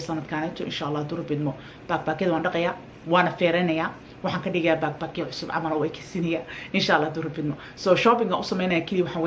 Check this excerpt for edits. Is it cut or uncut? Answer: cut